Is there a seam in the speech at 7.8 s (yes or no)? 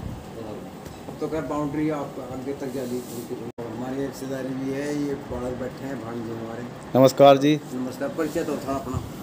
no